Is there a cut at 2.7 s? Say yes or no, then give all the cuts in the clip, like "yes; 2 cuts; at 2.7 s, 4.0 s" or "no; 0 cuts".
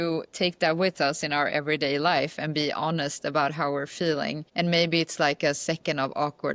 no; 1 cut; at 4.4 s